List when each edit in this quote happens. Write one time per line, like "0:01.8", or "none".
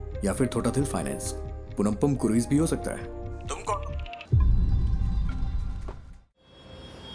0:04.1
0:06.4